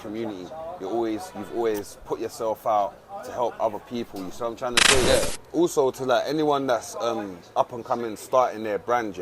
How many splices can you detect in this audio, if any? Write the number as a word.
one